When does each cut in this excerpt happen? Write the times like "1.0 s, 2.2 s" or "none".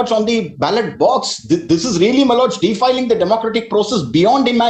none